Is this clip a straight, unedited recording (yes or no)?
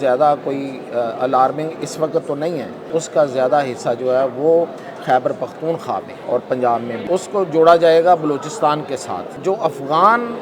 no